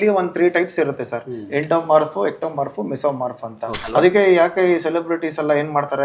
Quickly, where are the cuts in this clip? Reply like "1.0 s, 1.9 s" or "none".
3.7 s